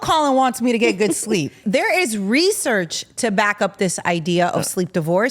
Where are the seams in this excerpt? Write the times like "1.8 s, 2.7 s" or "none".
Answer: 1.6 s